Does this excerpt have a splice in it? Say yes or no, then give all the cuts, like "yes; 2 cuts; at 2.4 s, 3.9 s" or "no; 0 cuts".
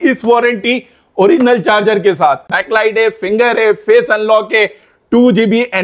yes; 1 cut; at 2.5 s